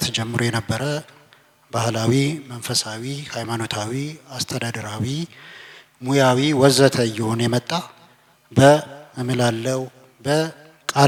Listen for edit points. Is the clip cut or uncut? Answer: uncut